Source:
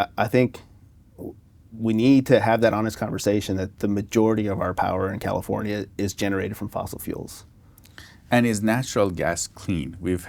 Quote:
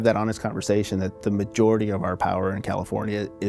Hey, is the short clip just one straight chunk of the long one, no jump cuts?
yes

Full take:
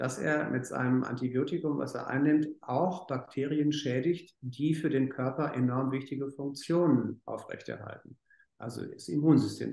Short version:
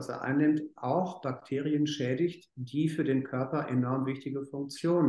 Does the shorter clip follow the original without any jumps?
yes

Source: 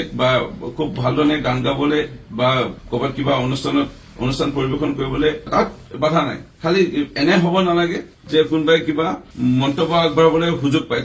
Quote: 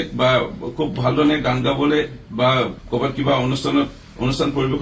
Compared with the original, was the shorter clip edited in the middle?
no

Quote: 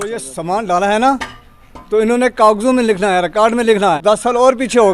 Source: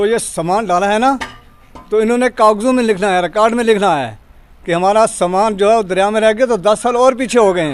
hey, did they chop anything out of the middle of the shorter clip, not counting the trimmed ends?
yes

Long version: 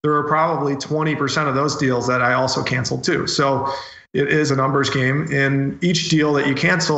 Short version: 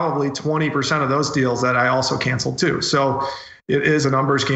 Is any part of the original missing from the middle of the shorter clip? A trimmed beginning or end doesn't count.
no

